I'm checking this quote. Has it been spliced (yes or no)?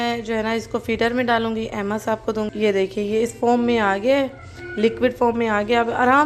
no